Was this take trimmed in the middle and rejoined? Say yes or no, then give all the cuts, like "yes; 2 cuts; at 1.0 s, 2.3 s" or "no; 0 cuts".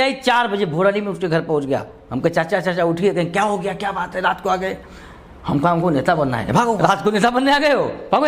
yes; 1 cut; at 6.8 s